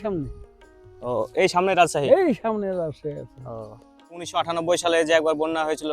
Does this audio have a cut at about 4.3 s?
yes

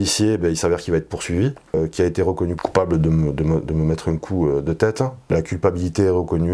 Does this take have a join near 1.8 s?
yes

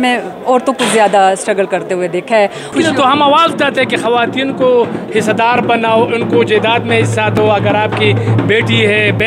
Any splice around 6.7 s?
no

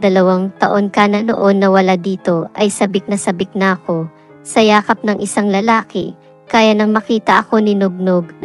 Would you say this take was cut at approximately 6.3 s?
no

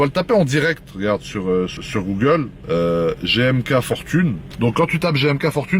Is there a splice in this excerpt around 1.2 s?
no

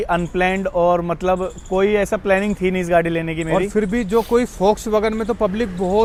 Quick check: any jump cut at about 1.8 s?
no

